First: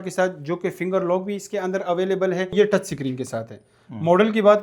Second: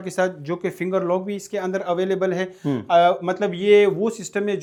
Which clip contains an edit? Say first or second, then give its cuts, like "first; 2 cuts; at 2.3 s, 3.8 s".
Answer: first; 1 cut; at 2.5 s